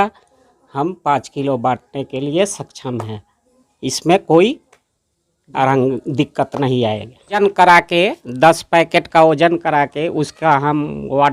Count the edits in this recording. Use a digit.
1